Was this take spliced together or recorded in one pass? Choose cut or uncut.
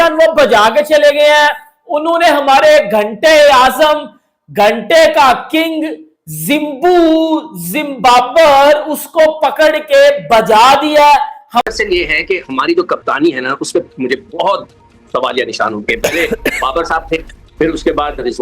cut